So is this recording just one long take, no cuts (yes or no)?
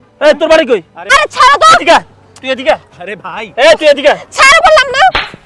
no